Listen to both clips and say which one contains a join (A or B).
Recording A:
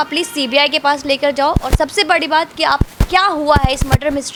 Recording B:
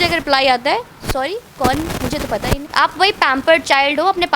B